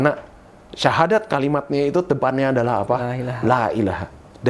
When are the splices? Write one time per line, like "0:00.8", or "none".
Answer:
none